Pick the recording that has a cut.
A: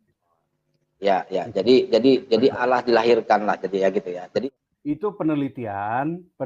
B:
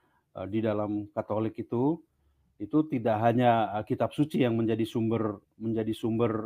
A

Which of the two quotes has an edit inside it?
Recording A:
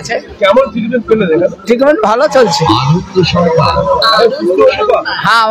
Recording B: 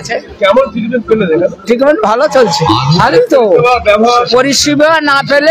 B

